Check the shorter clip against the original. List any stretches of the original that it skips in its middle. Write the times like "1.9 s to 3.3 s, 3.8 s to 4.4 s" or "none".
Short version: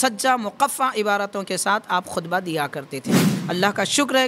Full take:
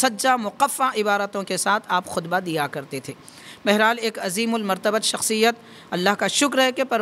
3.3 s to 5.7 s